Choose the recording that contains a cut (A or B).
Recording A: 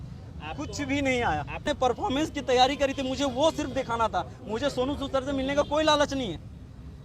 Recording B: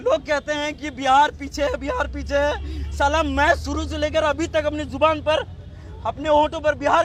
A